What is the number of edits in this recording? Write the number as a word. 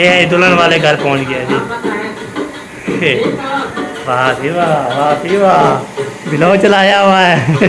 zero